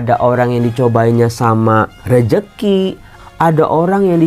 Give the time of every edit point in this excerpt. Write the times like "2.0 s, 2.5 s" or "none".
1.9 s, 3.2 s